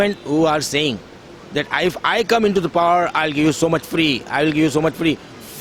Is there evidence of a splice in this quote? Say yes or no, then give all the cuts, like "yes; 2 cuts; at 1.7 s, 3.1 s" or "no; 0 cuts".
no; 0 cuts